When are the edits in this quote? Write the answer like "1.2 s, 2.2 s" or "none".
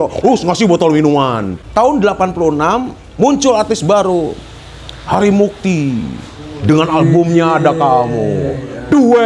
1.5 s

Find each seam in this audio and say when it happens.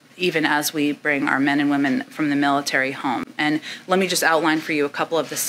none

